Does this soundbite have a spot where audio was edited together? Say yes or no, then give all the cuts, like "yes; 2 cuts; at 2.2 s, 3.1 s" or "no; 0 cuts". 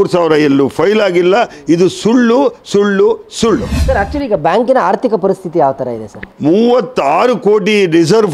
yes; 2 cuts; at 3.7 s, 6.3 s